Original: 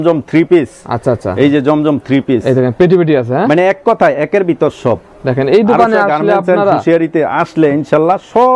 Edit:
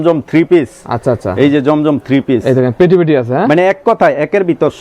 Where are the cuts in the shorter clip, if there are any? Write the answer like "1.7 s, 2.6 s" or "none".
none